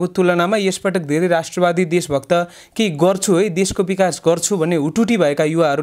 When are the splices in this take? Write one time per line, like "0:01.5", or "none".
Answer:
none